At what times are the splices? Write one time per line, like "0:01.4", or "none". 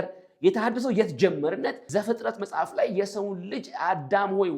0:01.8